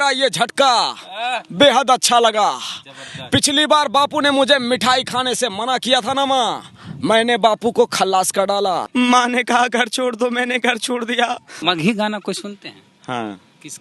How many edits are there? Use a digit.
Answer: 2